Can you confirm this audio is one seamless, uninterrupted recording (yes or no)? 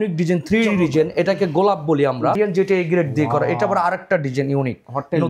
no